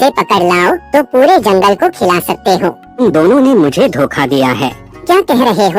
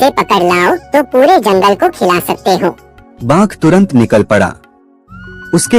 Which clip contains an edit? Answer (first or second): first